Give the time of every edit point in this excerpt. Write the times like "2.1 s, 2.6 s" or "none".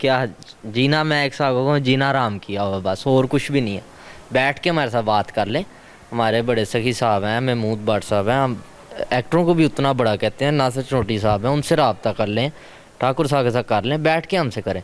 none